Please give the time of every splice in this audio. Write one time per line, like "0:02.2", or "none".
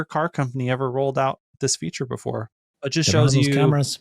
0:02.7